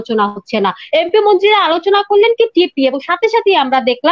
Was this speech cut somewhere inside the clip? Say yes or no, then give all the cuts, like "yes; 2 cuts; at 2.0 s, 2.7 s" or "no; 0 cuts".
no; 0 cuts